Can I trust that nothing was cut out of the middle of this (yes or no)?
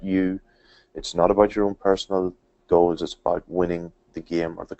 yes